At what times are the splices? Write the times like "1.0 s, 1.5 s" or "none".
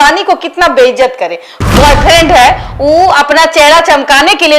1.6 s